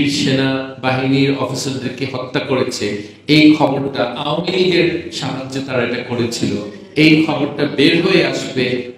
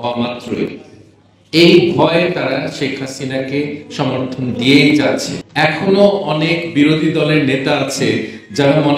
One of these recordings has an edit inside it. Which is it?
second; 1 cut; at 5.4 s

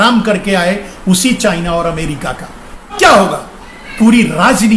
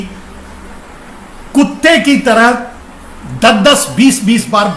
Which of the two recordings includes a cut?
first; 1 cut; at 2.9 s

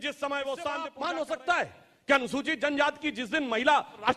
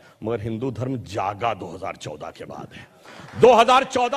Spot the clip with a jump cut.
first; 1 cut; at 0.9 s

